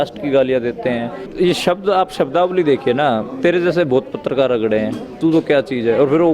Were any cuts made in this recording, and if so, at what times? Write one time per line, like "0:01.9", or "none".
0:01.3

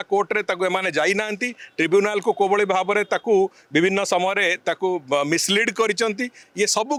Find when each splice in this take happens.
none

